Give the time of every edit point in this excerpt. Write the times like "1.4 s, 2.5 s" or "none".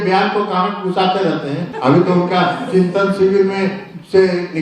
1.7 s